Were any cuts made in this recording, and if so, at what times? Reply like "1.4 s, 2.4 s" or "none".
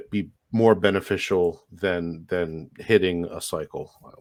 none